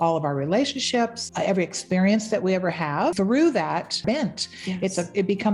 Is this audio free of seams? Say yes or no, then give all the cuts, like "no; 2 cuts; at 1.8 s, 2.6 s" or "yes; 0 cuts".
no; 3 cuts; at 1.2 s, 3.1 s, 4.0 s